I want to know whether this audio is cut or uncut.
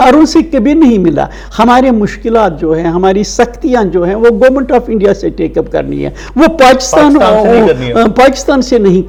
uncut